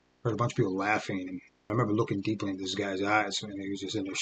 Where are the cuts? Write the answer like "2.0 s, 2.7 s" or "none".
1.7 s